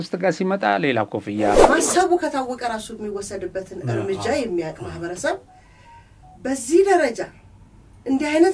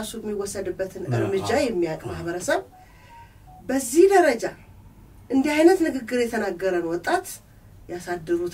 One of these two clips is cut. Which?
first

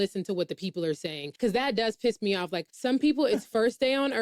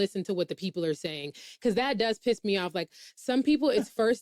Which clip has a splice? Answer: first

